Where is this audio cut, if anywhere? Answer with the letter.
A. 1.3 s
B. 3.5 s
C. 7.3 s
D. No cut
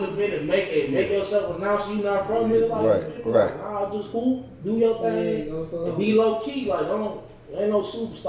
D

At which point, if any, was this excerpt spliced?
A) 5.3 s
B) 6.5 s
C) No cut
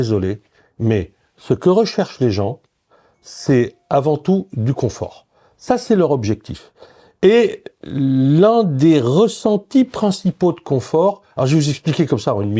C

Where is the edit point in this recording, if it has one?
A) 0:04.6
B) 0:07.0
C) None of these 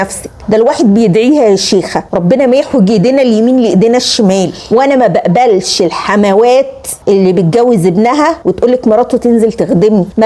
A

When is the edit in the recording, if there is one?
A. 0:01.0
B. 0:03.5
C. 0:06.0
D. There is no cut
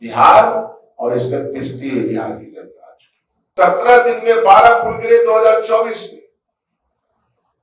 B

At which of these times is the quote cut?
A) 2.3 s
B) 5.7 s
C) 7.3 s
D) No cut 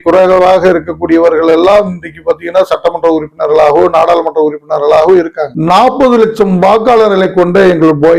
D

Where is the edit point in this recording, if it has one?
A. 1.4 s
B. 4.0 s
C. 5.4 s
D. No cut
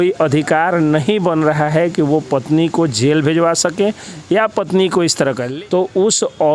C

